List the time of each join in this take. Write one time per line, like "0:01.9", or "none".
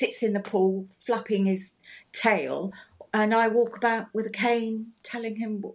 none